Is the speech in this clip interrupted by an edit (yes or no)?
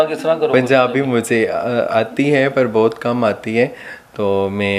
no